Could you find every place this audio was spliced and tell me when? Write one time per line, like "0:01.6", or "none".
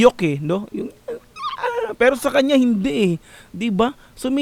none

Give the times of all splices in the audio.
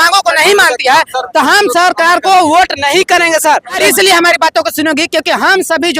0:03.8

